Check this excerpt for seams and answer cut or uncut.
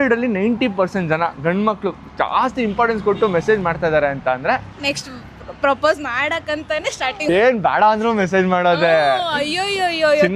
cut